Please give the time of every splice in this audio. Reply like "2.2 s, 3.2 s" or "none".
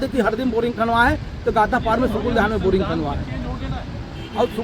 none